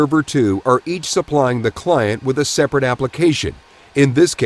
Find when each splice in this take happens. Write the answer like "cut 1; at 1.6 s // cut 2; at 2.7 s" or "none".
cut 1; at 3.1 s